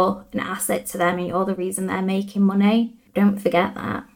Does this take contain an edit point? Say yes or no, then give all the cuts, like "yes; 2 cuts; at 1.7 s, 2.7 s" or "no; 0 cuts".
yes; 1 cut; at 3.0 s